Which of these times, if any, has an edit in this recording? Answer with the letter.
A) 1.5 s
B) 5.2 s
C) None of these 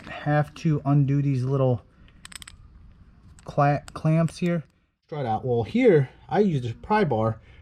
B